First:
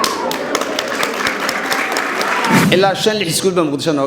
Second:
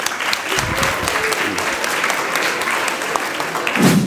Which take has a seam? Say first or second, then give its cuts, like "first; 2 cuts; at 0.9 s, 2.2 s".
first; 1 cut; at 2.6 s